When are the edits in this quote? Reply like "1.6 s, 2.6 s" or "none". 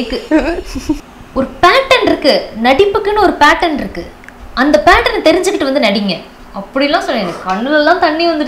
1.0 s